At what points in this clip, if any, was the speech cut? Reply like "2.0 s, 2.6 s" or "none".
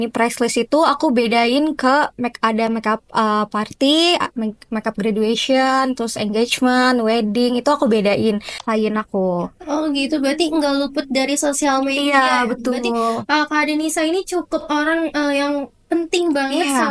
8.6 s

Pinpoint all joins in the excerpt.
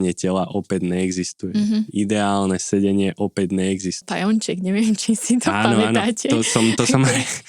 4.0 s

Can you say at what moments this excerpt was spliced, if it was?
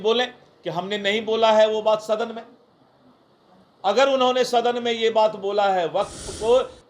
none

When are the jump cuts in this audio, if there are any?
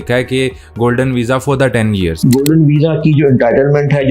2.2 s

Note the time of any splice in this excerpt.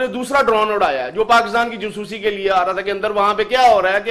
none

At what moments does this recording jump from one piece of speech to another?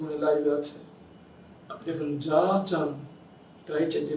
none

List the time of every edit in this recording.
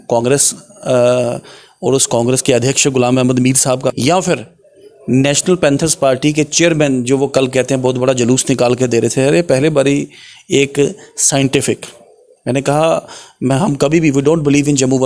3.9 s

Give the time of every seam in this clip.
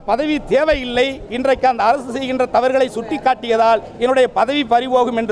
1.3 s

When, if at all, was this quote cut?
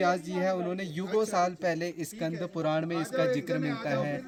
none

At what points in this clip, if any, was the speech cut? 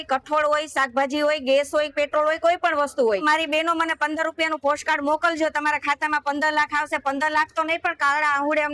3.2 s

